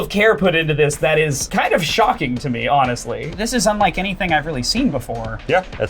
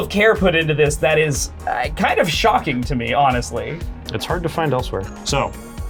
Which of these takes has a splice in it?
first; 2 cuts; at 1.4 s, 3.2 s

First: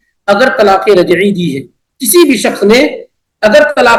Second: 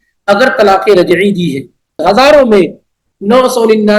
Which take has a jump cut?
second; 1 cut; at 2.0 s

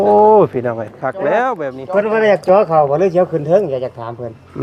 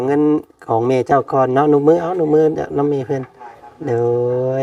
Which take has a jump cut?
first; 1 cut; at 1.7 s

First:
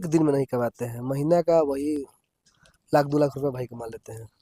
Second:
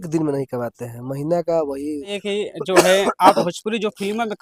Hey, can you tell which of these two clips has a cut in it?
second; 1 cut; at 2.1 s

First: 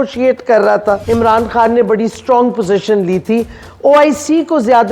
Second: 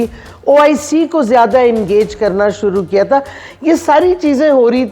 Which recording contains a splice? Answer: first; 1 cut; at 1.0 s

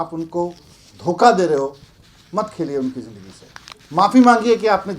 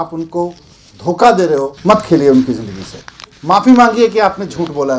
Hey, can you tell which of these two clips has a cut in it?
second; 1 cut; at 1.7 s

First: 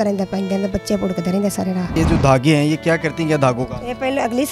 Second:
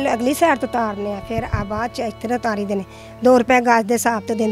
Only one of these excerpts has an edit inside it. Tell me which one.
first; 1 cut; at 1.9 s

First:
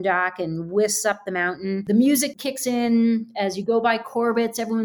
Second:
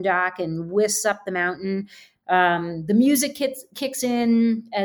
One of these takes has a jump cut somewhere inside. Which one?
first; 2 cuts; at 1.8 s, 2.3 s

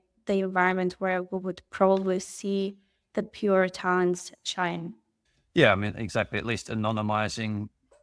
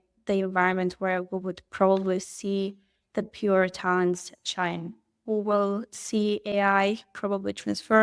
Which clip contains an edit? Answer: second; 1 cut; at 5.2 s

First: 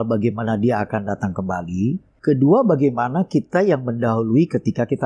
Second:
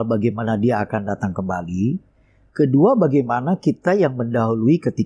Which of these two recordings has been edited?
first; 1 cut; at 2.1 s

